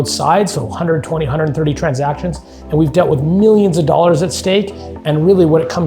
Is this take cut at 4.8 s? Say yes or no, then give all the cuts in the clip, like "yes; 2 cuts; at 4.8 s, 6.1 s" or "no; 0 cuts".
no; 1 cut; at 2.6 s